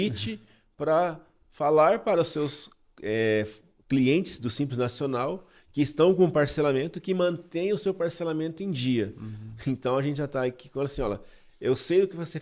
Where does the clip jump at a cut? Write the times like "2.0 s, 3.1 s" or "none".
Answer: none